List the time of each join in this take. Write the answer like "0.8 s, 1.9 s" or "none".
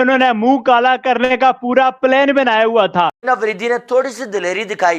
3.2 s